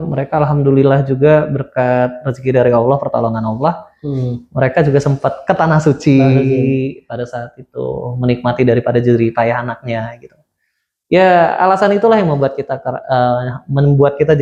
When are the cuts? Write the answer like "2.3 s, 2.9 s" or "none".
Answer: none